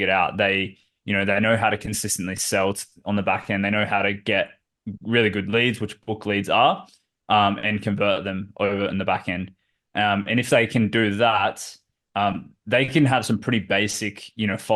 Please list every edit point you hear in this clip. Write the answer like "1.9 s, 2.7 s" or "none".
none